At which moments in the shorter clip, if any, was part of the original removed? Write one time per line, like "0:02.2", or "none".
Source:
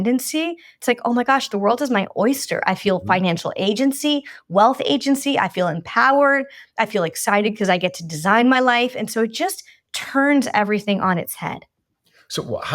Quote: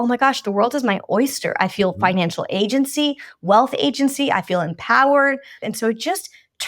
0:05.6